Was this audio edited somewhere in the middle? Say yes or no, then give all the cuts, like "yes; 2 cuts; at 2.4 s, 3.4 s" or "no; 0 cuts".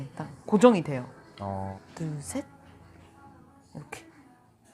yes; 1 cut; at 1.8 s